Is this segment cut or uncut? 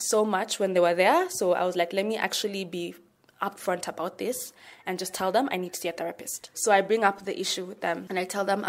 uncut